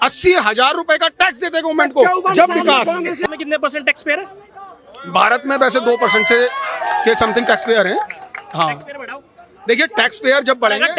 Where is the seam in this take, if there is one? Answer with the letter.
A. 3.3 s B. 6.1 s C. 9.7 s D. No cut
A